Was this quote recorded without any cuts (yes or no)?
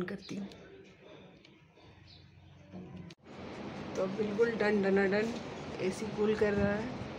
yes